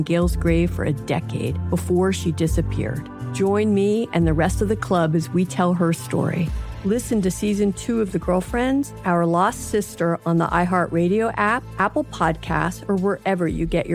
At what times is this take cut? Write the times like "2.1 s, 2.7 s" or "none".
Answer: none